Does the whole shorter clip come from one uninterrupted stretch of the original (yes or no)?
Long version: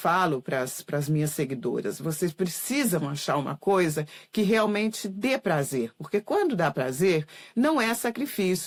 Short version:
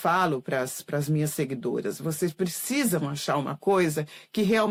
yes